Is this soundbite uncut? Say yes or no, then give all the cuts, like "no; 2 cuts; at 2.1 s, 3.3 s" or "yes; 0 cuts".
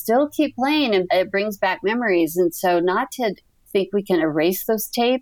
no; 2 cuts; at 1.1 s, 3.6 s